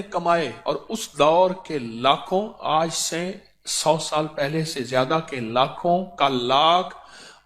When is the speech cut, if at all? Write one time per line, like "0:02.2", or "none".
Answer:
none